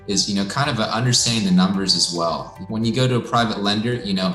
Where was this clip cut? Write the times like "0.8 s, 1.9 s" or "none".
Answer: 2.5 s